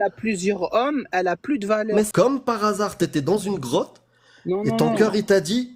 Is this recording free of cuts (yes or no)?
no